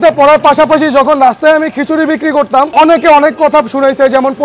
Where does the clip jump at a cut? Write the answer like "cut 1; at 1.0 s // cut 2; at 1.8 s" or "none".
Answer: cut 1; at 2.7 s

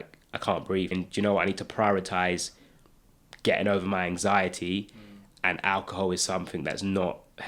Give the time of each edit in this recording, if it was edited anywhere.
cut 1; at 0.9 s

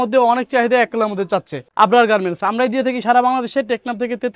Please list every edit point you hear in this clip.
cut 1; at 1.6 s

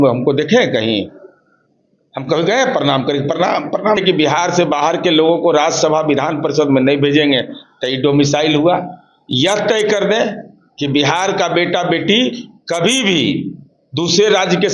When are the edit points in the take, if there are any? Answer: cut 1; at 4.0 s

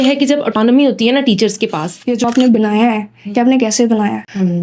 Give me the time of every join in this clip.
cut 1; at 2.0 s

